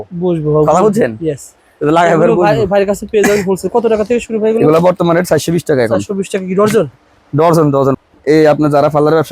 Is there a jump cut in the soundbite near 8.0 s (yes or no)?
yes